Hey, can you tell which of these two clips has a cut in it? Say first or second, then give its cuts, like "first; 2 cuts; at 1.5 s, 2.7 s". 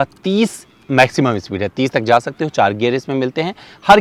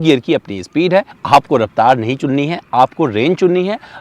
second; 1 cut; at 1.2 s